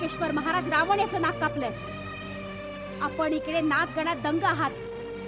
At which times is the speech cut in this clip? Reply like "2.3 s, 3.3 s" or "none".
none